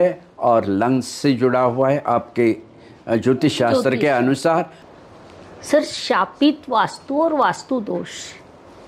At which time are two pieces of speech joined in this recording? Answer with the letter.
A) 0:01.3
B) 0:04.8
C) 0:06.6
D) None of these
B